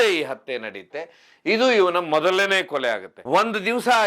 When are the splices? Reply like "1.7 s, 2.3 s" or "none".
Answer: 3.1 s